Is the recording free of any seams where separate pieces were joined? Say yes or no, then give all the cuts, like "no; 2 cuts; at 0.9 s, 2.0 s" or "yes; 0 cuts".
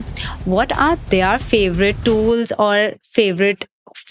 yes; 0 cuts